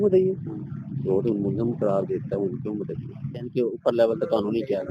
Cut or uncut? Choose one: cut